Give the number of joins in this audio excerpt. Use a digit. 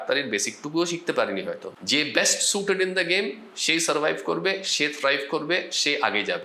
1